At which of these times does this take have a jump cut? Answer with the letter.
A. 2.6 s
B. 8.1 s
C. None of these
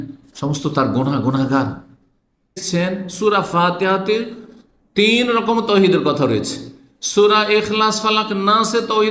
A